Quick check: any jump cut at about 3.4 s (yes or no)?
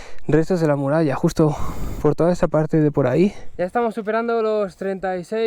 yes